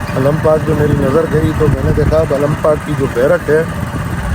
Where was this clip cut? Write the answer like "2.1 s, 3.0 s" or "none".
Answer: none